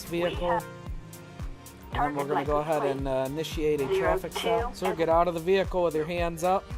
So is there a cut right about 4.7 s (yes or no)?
yes